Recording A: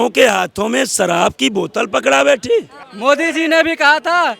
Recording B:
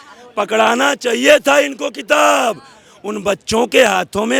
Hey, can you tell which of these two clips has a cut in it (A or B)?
A